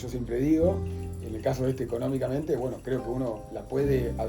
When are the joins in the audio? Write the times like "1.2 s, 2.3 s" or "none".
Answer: 0.9 s